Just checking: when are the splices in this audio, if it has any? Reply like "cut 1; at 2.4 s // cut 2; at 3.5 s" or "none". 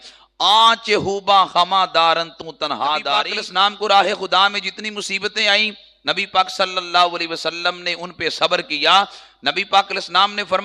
cut 1; at 3.3 s